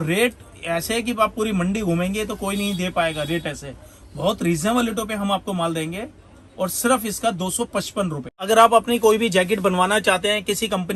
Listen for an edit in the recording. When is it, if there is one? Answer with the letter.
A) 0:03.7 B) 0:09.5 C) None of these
C